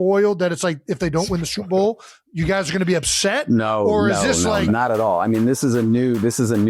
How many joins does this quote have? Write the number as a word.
one